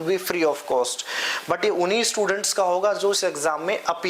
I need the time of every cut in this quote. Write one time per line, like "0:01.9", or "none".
none